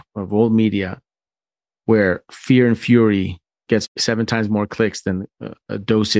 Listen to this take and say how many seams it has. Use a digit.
1